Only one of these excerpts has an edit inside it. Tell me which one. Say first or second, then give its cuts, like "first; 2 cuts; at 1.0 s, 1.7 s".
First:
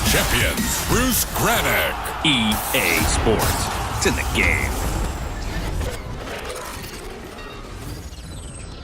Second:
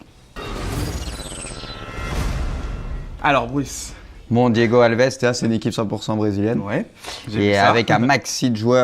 first; 1 cut; at 7.0 s